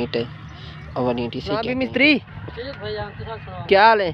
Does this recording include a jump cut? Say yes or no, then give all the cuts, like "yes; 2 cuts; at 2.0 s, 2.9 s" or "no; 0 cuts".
yes; 1 cut; at 1.6 s